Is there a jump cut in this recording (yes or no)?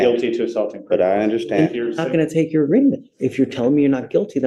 no